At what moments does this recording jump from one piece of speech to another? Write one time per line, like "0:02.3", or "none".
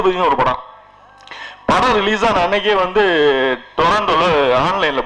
none